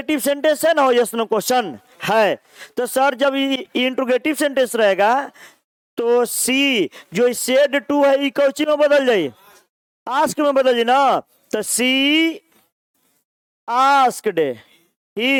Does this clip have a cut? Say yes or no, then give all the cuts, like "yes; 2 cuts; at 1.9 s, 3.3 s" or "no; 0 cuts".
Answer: no; 0 cuts